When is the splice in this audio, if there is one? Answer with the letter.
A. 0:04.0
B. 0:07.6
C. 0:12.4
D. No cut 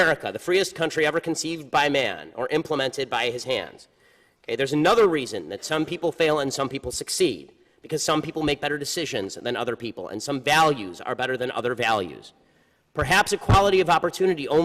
C